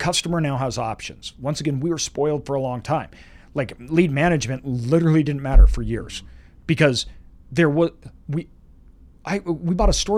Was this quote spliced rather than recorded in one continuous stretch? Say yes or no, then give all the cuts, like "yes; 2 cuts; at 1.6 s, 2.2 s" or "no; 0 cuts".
no; 0 cuts